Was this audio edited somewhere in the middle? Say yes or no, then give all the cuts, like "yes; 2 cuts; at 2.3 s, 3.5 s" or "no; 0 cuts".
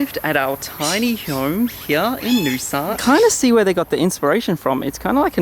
yes; 1 cut; at 3.0 s